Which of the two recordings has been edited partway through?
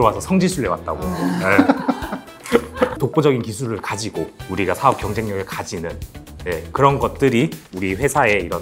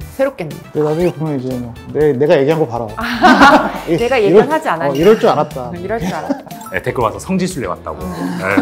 first; 1 cut; at 2.9 s

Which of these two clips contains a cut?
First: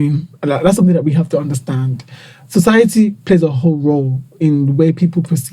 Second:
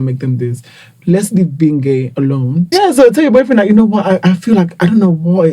second; 1 cut; at 2.7 s

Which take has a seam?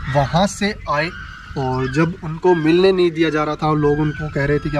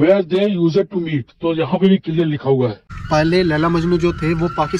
second; 1 cut; at 2.9 s

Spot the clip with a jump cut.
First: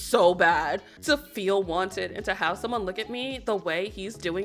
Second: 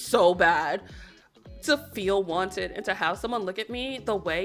first; 1 cut; at 0.9 s

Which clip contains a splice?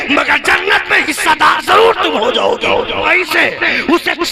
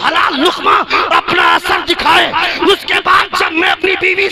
first; 1 cut; at 3.1 s

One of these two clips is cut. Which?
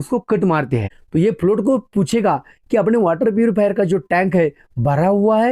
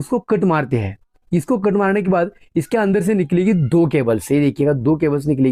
first; 1 cut; at 1.0 s

